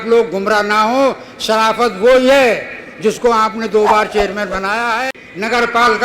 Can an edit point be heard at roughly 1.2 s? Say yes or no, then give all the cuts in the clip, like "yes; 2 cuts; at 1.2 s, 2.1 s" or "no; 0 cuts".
no; 1 cut; at 5.0 s